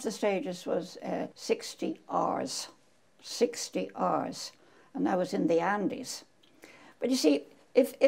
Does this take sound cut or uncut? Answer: cut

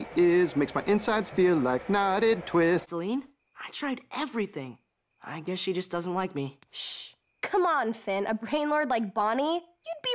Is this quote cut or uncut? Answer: cut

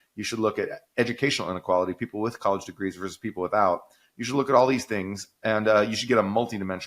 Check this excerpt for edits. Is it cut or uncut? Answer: uncut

